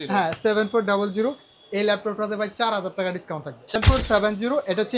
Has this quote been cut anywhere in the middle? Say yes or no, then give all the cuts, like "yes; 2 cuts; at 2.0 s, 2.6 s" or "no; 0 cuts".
yes; 1 cut; at 3.7 s